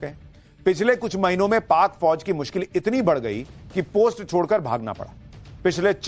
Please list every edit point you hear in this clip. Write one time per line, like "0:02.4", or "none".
0:04.5